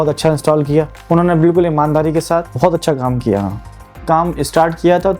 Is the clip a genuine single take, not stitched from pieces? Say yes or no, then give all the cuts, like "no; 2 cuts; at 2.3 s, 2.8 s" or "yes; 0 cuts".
no; 3 cuts; at 1.0 s, 2.5 s, 4.0 s